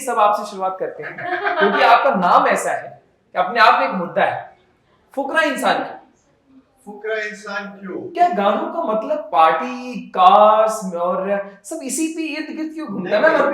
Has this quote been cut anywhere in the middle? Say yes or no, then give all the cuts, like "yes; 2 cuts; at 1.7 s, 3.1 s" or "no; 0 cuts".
yes; 1 cut; at 8.1 s